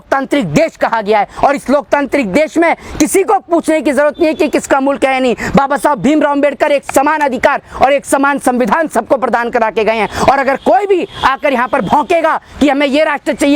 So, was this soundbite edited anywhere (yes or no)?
no